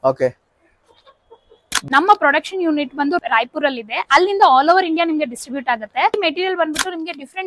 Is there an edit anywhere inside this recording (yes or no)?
yes